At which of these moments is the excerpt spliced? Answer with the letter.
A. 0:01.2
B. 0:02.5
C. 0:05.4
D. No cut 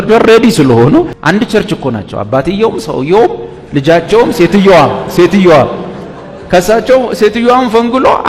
A